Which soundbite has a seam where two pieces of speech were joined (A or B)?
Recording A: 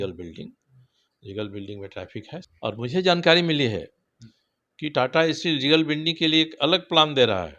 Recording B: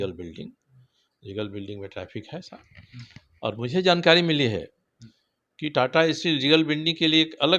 A